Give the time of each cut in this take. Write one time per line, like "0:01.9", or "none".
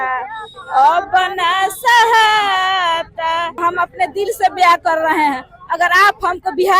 0:03.5